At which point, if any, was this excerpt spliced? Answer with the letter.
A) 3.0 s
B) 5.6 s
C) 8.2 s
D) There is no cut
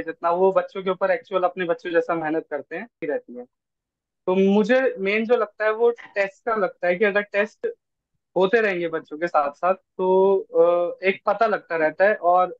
A